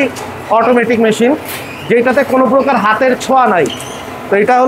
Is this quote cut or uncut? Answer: uncut